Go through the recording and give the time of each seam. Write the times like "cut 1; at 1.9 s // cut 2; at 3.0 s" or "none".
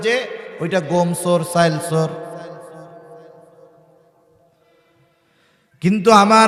none